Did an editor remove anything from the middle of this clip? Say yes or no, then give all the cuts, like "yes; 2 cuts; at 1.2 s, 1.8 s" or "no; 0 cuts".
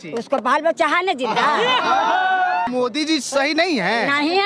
yes; 1 cut; at 2.7 s